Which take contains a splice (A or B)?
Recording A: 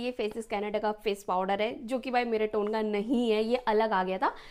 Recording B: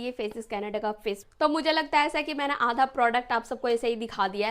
B